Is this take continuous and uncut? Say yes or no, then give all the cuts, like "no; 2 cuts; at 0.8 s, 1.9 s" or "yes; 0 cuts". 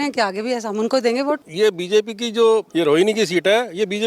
no; 2 cuts; at 1.5 s, 2.7 s